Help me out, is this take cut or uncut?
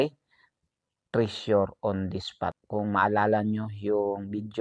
cut